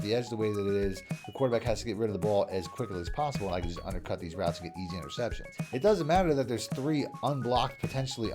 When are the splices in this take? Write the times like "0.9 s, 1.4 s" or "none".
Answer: 5.5 s